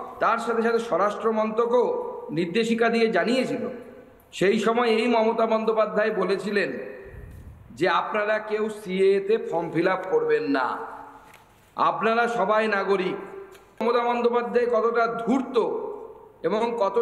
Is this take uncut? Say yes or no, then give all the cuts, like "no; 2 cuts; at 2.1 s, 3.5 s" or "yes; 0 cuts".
no; 1 cut; at 13.8 s